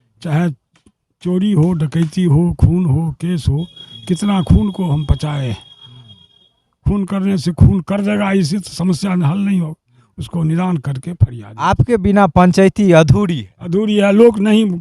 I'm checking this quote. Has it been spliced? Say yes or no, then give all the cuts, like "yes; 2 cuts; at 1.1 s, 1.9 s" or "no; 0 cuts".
yes; 1 cut; at 11.4 s